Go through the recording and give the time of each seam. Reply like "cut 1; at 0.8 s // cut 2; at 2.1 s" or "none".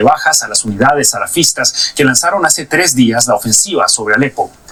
none